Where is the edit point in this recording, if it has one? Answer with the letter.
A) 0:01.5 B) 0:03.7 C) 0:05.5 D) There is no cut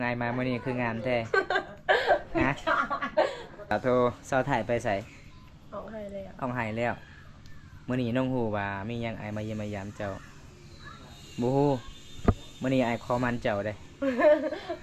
B